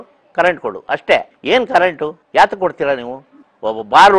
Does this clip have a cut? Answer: yes; 2 cuts; at 1.3 s, 2.1 s

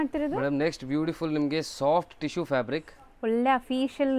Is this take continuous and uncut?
yes; 0 cuts

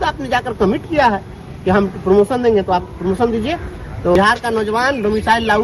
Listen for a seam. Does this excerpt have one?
yes; 1 cut; at 4.1 s

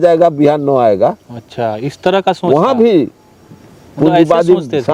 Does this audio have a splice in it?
no; 0 cuts

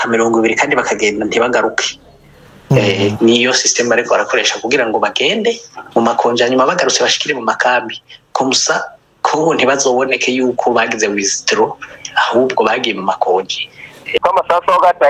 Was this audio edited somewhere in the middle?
yes; 1 cut; at 14.2 s

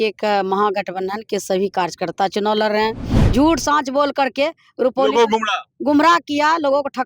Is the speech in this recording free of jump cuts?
no; 1 cut; at 3.1 s

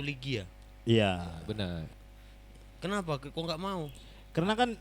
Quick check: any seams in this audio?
yes; 1 cut; at 2.0 s

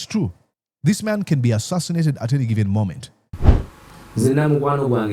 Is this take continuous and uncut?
no; 1 cut; at 3.4 s

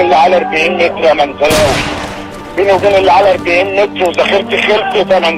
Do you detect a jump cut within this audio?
no; 0 cuts

